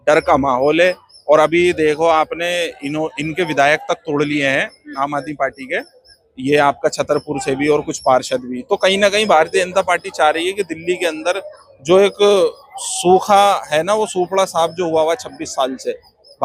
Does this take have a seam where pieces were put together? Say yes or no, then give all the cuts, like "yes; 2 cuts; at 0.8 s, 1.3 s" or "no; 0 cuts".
no; 0 cuts